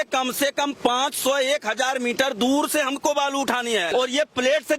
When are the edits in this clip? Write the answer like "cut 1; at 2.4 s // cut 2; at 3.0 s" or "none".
cut 1; at 3.9 s